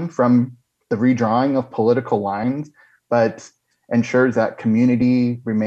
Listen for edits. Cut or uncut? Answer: cut